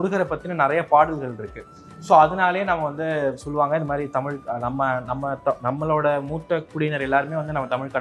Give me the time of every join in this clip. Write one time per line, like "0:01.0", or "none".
none